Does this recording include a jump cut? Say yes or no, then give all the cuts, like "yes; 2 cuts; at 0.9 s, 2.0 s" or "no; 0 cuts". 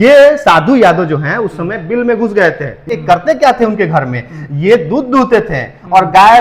yes; 1 cut; at 2.9 s